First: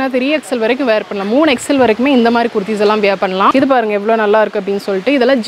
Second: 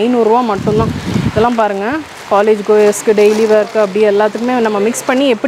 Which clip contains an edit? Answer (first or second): first